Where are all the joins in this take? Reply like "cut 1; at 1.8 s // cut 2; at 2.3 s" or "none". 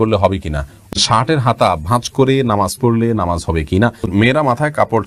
cut 1; at 0.9 s // cut 2; at 4.1 s

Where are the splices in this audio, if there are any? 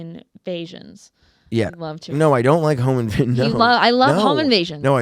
none

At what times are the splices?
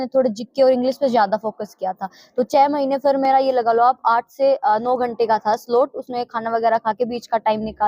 none

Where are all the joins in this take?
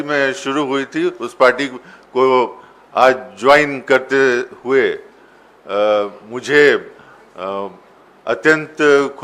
none

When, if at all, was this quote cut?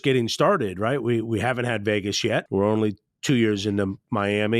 cut 1; at 2.5 s

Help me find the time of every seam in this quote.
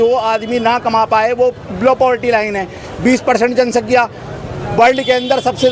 none

